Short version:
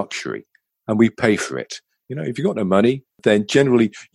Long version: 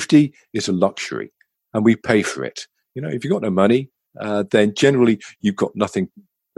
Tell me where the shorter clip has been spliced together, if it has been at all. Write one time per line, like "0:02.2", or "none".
0:03.2